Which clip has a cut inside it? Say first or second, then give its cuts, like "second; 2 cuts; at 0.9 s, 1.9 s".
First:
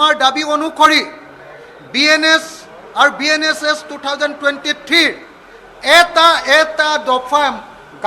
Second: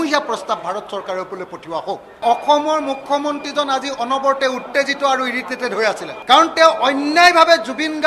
second; 2 cuts; at 2.2 s, 6.1 s